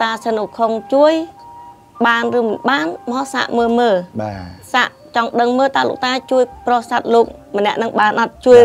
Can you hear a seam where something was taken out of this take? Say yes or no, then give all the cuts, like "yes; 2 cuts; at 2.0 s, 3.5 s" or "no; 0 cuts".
no; 0 cuts